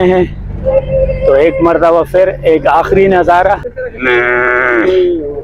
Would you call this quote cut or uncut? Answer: cut